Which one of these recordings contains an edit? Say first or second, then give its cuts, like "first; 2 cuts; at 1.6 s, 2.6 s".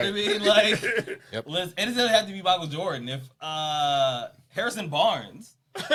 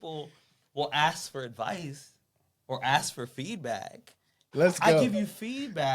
second; 1 cut; at 4.5 s